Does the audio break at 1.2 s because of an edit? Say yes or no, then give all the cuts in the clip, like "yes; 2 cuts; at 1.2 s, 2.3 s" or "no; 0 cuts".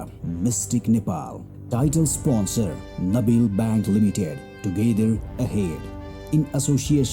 yes; 1 cut; at 1.2 s